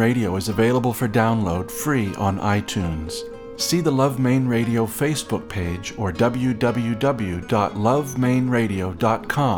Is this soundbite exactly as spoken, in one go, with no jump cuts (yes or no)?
yes